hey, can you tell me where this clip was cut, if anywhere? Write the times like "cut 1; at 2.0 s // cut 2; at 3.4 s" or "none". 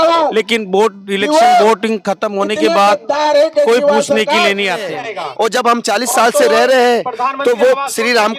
cut 1; at 4.9 s